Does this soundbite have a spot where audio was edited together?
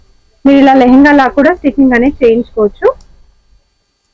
no; 0 cuts

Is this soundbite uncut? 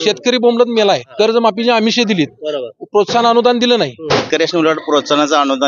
no; 2 cuts; at 1.1 s, 4.1 s

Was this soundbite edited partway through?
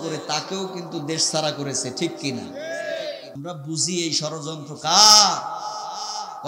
yes; 1 cut; at 3.3 s

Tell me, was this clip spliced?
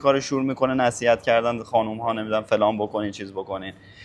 no; 0 cuts

